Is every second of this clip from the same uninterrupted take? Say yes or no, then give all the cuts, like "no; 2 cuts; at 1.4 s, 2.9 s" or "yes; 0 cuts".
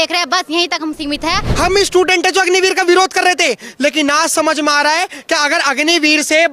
no; 1 cut; at 1.5 s